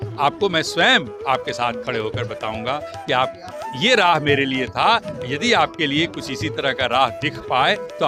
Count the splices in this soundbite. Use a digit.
0